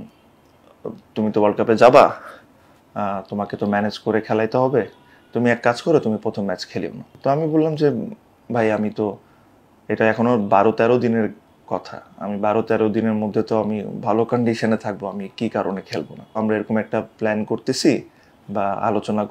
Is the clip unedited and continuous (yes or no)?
no